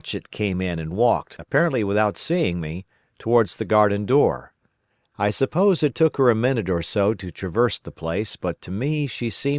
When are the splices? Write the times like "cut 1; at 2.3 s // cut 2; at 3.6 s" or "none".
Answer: cut 1; at 1.3 s